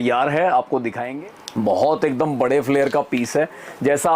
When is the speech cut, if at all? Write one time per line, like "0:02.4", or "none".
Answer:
0:01.0